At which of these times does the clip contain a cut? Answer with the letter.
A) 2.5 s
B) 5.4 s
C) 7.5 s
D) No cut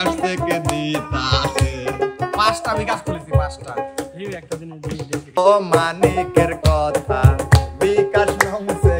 B